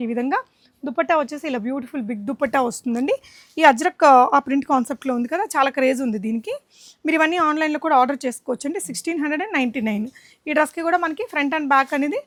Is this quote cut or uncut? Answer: uncut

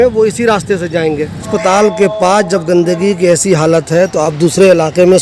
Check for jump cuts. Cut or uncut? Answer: cut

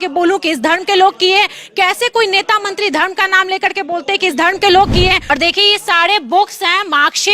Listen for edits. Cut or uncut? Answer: cut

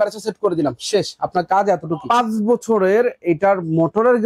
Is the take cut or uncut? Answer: cut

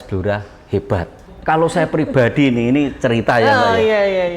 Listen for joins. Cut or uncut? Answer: cut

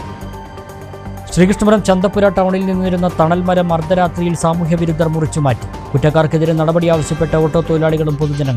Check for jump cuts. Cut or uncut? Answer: uncut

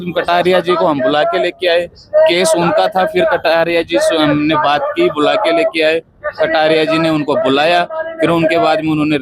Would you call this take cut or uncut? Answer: uncut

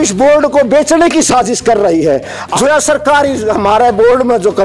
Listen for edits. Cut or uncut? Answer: cut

